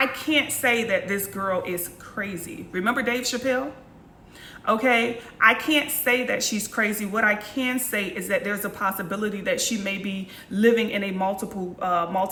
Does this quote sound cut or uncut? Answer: uncut